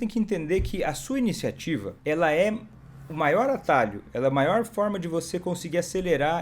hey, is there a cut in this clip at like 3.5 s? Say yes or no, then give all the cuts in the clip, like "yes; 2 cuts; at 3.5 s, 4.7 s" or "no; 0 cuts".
no; 1 cut; at 1.9 s